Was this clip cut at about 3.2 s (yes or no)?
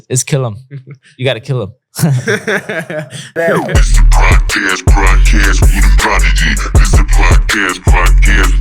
yes